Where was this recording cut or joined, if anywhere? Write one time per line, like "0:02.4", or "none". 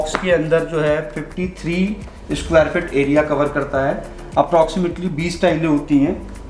none